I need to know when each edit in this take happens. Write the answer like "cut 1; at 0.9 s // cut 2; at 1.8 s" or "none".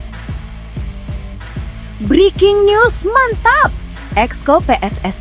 cut 1; at 1.9 s